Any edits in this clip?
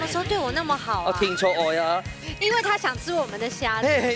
no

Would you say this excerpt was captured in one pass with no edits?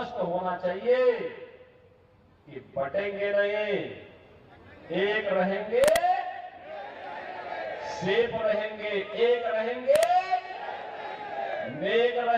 yes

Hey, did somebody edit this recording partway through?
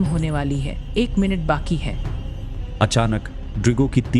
yes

